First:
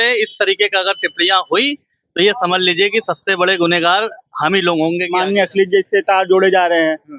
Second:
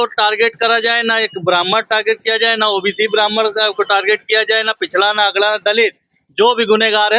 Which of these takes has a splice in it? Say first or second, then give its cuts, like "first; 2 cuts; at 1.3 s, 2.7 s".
first; 1 cut; at 5.1 s